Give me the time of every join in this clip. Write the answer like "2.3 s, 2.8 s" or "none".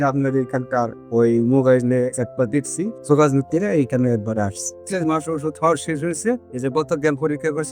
3.0 s, 4.8 s